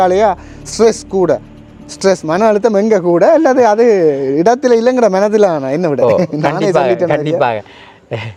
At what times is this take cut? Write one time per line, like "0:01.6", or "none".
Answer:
none